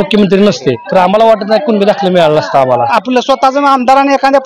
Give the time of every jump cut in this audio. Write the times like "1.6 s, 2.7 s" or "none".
0.8 s, 2.9 s